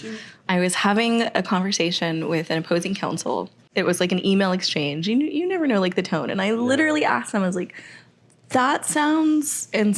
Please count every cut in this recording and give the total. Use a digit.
1